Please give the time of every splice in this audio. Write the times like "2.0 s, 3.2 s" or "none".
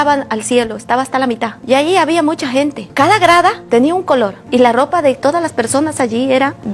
none